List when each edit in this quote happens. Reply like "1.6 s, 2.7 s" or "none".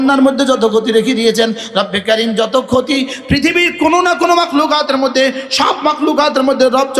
none